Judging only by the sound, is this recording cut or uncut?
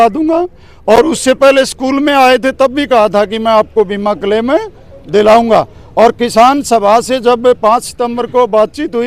uncut